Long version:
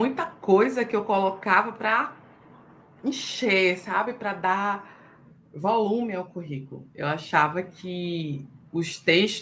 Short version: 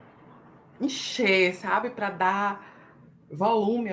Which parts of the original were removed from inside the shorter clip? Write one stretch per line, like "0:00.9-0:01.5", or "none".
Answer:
none